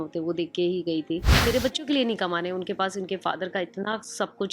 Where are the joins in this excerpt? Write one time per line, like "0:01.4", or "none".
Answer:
0:01.4

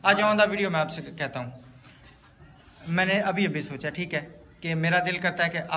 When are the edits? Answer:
none

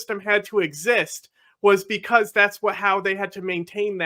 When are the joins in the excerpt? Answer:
none

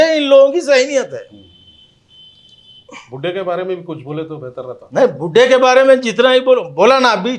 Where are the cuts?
none

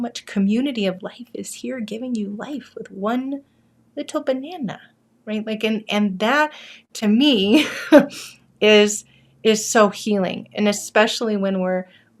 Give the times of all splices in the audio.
none

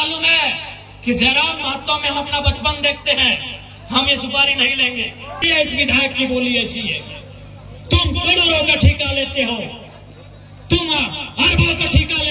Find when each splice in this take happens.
0:05.4

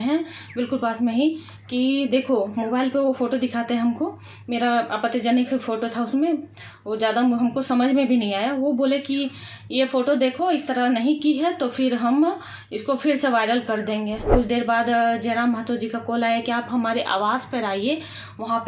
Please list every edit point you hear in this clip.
0:14.3

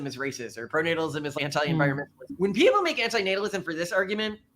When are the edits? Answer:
0:01.3
0:02.2

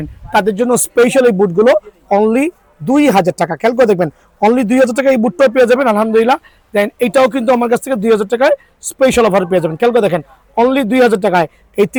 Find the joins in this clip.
none

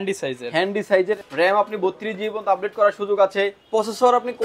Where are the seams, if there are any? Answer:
0:01.2
0:03.6

